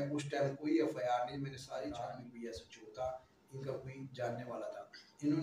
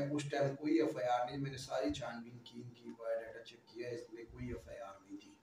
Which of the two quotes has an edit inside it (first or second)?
first